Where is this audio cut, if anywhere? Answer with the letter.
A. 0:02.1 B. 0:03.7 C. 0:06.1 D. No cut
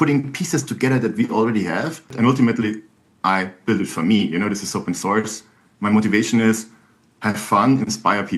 A